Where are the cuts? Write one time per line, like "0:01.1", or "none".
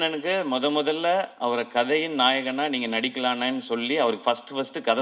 none